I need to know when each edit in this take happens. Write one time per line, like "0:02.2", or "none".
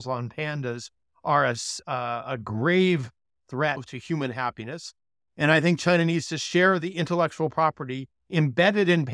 0:01.8
0:03.9